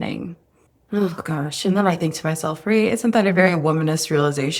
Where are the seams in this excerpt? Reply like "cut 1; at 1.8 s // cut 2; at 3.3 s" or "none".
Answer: none